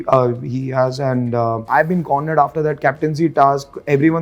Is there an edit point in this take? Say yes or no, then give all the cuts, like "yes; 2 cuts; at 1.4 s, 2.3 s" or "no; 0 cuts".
yes; 1 cut; at 1.7 s